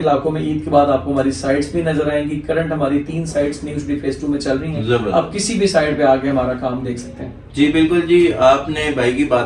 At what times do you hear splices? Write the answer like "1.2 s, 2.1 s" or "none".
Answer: none

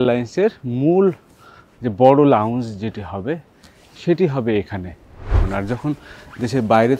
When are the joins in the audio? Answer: 5.4 s

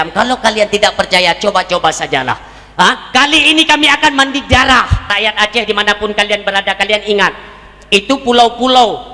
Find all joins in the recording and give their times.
5.1 s

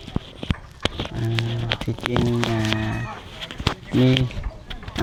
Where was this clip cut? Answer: none

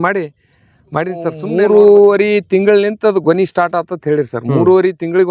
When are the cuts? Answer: 1.4 s

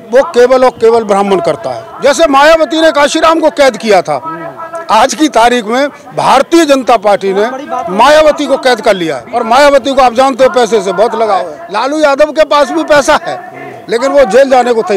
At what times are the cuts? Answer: 1.8 s, 9.2 s, 11.6 s

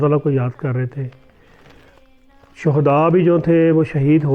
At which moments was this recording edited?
none

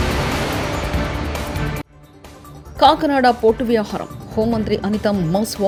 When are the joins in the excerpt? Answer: none

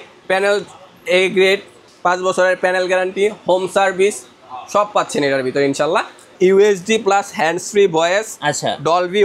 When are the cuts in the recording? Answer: 6.3 s

